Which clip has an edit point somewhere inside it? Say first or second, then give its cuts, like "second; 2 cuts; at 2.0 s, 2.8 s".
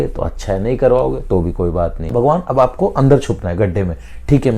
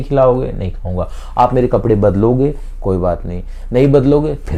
first; 1 cut; at 2.0 s